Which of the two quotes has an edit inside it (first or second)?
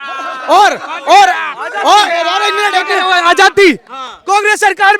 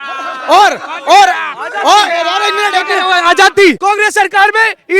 second